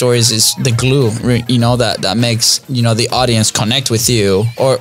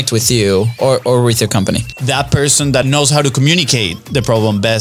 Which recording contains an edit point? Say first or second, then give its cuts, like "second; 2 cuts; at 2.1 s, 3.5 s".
second; 2 cuts; at 1.9 s, 2.8 s